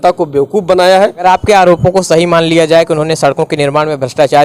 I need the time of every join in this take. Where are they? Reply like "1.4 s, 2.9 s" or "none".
1.2 s